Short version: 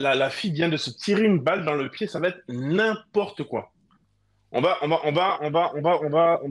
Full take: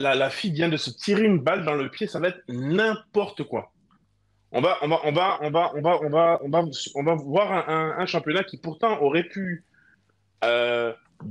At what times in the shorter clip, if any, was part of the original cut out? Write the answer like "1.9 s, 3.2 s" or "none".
none